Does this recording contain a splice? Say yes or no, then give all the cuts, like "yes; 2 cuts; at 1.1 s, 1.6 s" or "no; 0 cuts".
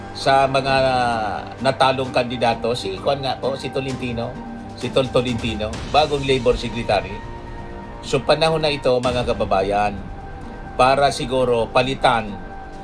no; 0 cuts